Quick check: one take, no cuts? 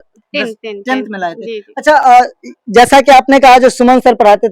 yes; 0 cuts

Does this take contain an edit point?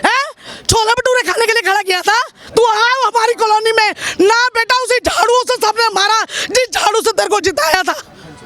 yes; 1 cut; at 2.4 s

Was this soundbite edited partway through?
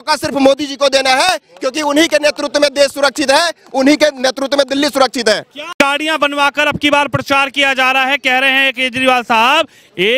no; 0 cuts

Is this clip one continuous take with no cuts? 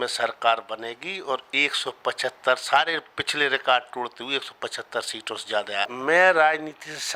no; 1 cut; at 5.9 s

